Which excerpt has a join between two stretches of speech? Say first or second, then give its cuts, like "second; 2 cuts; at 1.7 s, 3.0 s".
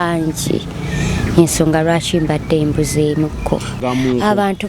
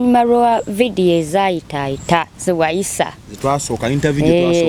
first; 1 cut; at 3.8 s